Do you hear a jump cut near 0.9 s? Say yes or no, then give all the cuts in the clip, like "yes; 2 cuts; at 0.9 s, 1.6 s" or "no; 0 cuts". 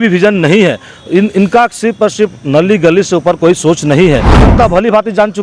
no; 1 cut; at 4.5 s